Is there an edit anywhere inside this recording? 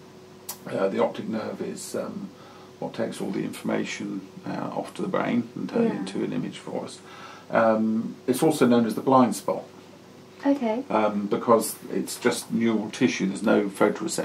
no; 0 cuts

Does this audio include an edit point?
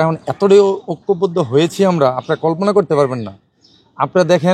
no; 0 cuts

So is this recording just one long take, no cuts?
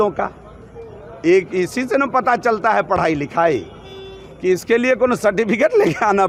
yes; 0 cuts

